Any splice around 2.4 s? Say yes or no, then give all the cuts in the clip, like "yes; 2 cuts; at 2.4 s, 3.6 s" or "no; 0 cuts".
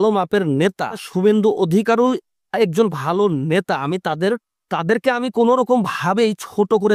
no; 1 cut; at 1.1 s